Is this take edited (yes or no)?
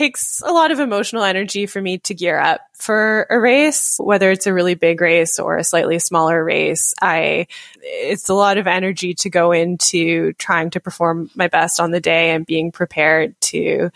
no